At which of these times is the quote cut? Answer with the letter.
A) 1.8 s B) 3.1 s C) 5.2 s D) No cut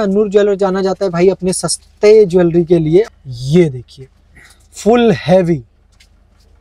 B